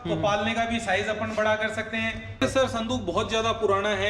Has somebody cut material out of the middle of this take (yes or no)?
yes